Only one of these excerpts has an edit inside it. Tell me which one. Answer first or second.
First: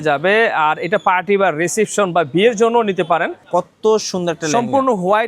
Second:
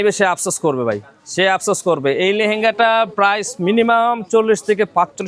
first